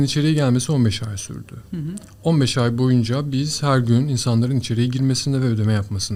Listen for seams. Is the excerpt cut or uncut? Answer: uncut